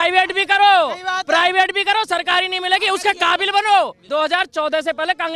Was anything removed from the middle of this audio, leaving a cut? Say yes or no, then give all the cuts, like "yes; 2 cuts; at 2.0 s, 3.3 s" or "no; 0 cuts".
yes; 1 cut; at 4.0 s